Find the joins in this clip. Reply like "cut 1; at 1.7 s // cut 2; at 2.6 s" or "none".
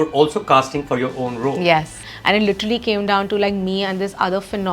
cut 1; at 2.0 s